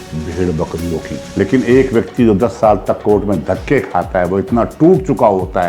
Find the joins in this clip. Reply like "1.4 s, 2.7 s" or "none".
1.2 s